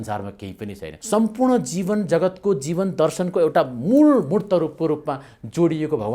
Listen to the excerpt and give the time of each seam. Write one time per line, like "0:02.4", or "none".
0:00.9